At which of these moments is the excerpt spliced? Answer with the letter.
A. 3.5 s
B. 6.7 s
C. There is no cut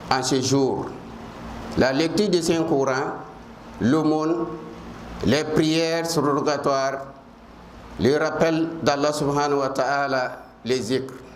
C